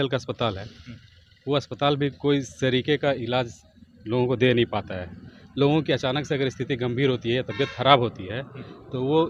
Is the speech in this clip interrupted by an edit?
no; 0 cuts

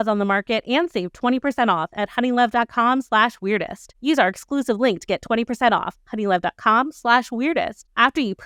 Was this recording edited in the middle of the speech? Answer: no; 0 cuts

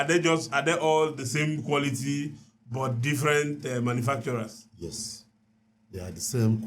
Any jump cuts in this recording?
no; 0 cuts

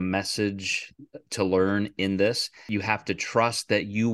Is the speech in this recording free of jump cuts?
no; 1 cut; at 2.5 s

